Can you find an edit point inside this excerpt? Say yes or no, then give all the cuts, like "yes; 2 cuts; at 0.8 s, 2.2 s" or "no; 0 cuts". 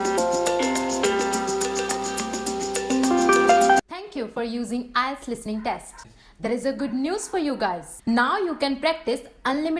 yes; 1 cut; at 3.8 s